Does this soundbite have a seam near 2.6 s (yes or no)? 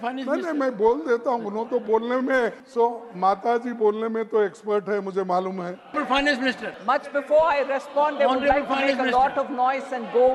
yes